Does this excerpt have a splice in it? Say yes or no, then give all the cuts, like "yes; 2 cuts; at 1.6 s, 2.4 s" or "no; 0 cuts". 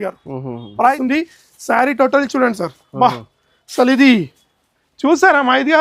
yes; 1 cut; at 1.0 s